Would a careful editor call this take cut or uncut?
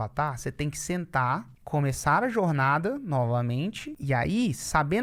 cut